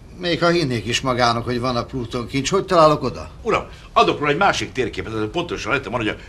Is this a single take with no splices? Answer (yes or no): yes